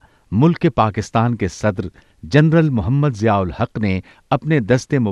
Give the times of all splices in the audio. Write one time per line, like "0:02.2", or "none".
none